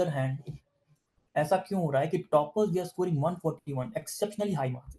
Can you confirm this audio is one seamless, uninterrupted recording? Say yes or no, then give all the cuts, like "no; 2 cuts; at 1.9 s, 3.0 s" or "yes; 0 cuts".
yes; 0 cuts